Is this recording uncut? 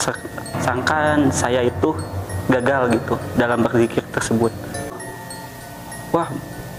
no; 1 cut; at 5.0 s

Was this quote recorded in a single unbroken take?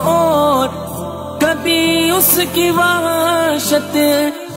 yes; 0 cuts

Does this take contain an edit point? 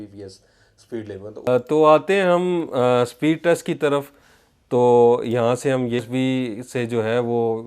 yes; 2 cuts; at 1.5 s, 6.0 s

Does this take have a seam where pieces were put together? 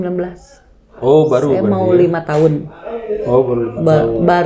no; 0 cuts

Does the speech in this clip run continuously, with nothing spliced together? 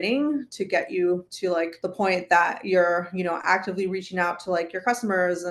no; 1 cut; at 1.8 s

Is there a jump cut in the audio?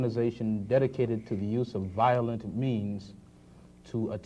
yes; 1 cut; at 3.3 s

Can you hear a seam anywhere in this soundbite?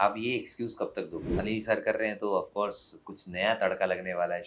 yes; 1 cut; at 1.3 s

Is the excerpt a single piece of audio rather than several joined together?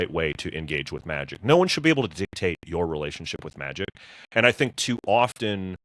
yes; 0 cuts

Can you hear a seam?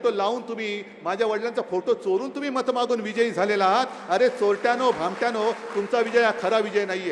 no; 0 cuts

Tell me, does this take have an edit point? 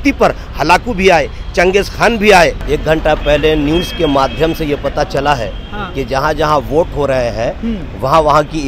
yes; 1 cut; at 2.6 s

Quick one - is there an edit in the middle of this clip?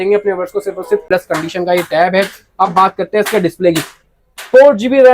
yes; 1 cut; at 1.0 s

